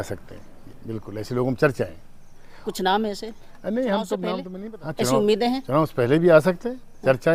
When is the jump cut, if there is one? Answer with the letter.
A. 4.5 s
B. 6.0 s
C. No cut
A